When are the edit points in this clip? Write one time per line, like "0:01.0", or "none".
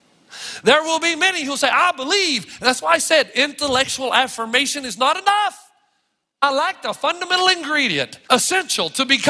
0:06.4
0:08.2